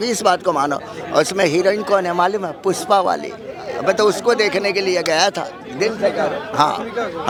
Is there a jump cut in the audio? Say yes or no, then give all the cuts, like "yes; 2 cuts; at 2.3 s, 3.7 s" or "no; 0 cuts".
no; 0 cuts